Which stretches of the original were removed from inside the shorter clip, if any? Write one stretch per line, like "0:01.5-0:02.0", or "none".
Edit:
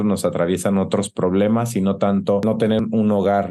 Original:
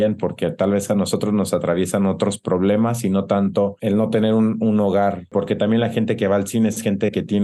0:03.8-0:04.2